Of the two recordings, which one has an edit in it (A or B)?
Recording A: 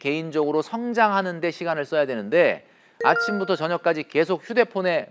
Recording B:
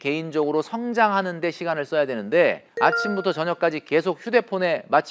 B